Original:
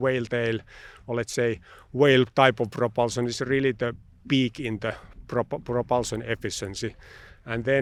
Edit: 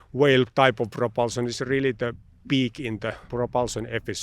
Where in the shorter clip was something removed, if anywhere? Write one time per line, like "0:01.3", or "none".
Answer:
0:03.2